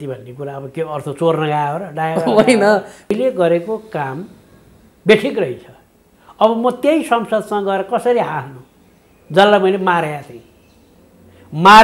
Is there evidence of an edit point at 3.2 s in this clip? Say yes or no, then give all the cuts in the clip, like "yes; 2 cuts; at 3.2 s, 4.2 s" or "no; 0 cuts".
yes; 1 cut; at 3.2 s